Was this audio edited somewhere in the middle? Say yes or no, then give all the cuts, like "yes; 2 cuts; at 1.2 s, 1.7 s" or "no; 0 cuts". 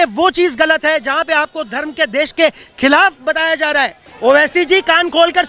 yes; 1 cut; at 4.0 s